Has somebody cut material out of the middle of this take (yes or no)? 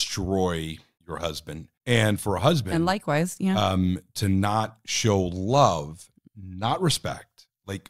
yes